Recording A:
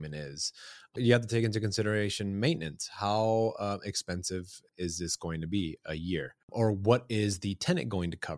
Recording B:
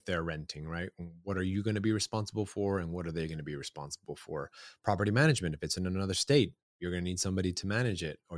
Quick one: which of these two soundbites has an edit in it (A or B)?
A